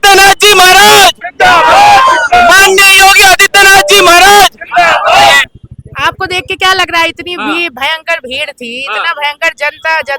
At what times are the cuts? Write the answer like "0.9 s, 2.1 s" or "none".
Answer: 5.5 s